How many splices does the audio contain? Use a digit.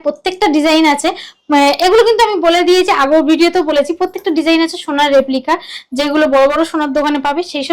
0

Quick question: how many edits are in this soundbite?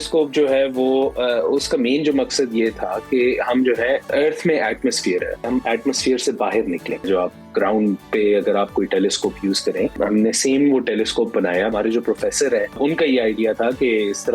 6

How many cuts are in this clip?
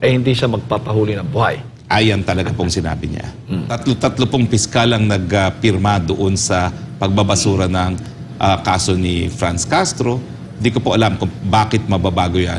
1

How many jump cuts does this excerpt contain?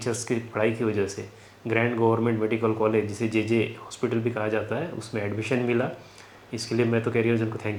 0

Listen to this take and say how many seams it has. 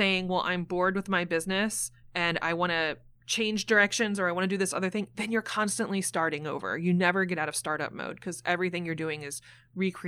0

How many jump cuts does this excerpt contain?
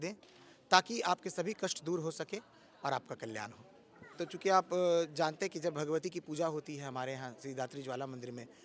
1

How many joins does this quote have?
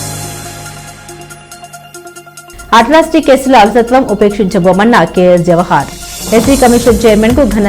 1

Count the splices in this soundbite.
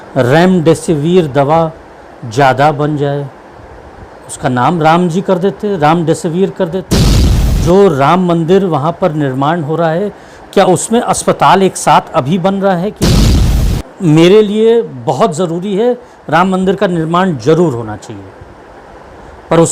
2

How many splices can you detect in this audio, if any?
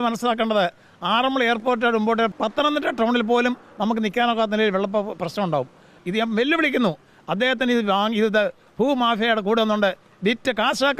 2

